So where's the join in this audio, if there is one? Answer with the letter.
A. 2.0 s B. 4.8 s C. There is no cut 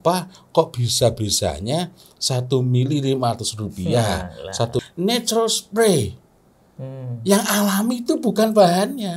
B